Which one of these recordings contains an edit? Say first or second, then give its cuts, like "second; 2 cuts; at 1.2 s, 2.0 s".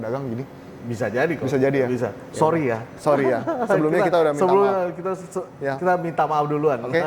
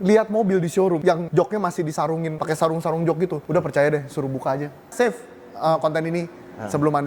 second; 4 cuts; at 1.2 s, 2.3 s, 3.4 s, 4.9 s